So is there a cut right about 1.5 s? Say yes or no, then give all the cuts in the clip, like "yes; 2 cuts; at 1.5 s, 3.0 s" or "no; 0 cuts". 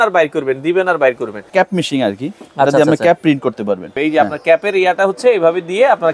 yes; 2 cuts; at 1.5 s, 4.0 s